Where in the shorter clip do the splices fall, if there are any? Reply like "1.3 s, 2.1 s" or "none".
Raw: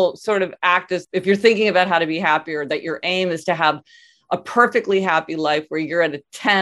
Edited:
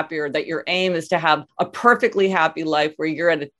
1.5 s